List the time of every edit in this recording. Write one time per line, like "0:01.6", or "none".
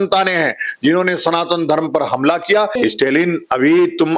0:02.7